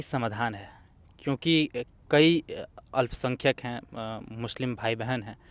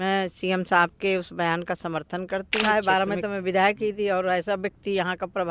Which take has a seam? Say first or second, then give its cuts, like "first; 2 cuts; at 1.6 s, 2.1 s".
second; 1 cut; at 2.6 s